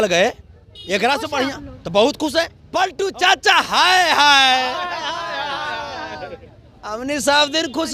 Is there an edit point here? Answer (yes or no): yes